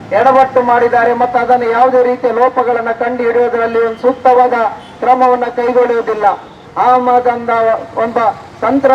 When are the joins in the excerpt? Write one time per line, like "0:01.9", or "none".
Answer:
0:06.6